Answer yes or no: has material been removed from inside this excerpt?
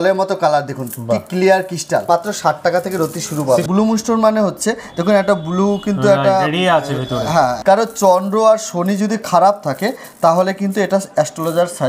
yes